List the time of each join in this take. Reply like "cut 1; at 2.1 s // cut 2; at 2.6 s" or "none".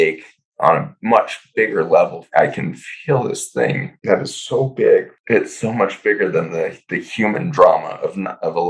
cut 1; at 2.2 s // cut 2; at 3.9 s // cut 3; at 5.1 s